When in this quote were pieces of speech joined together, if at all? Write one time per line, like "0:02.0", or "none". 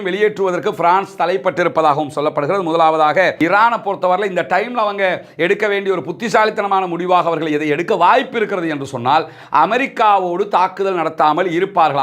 0:03.3